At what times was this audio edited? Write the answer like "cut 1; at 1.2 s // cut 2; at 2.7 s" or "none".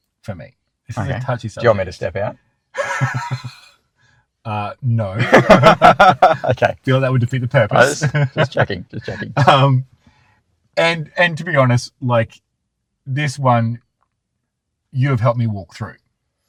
none